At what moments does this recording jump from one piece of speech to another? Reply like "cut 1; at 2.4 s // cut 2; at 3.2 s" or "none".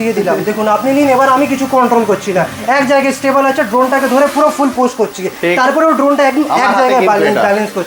none